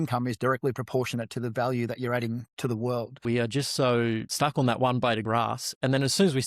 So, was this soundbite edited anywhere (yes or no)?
yes